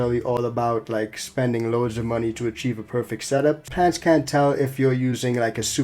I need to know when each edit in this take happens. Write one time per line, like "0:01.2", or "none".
0:03.7